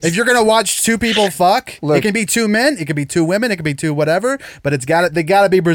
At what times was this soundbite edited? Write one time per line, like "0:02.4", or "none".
none